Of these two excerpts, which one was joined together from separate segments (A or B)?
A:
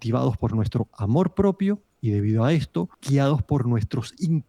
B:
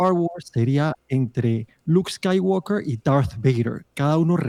A